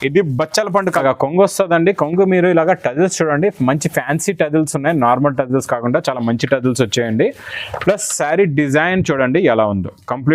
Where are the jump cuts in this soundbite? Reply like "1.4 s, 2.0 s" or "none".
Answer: 1.0 s